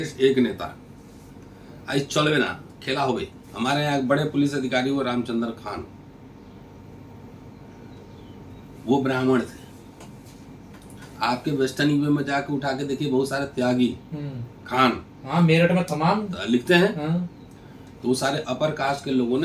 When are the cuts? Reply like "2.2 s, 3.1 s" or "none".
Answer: 3.4 s